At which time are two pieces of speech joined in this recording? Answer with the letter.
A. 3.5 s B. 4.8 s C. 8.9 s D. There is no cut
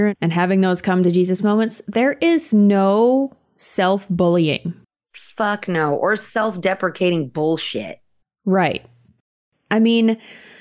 B